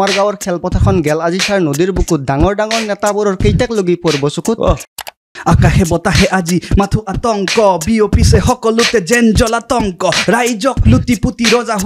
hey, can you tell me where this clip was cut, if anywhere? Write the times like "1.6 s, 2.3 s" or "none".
4.8 s